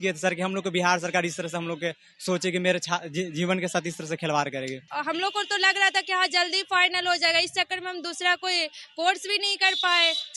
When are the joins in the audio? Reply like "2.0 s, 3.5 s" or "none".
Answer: 4.9 s